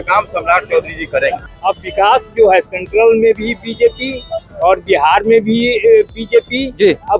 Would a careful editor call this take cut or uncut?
cut